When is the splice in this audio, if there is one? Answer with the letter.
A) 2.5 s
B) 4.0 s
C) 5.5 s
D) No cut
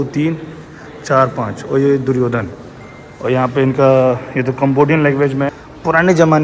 C